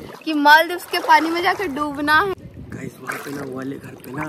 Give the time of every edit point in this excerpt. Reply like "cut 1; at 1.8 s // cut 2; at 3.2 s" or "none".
cut 1; at 2.5 s